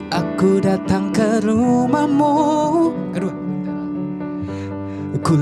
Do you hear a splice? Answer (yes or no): no